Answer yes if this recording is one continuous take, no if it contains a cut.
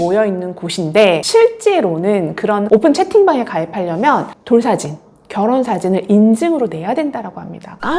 yes